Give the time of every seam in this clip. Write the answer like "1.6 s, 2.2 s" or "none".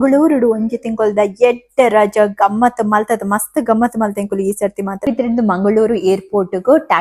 5.0 s